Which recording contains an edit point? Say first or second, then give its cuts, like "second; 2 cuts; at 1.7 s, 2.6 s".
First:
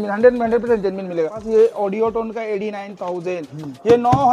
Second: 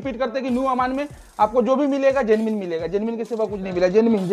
first; 1 cut; at 1.4 s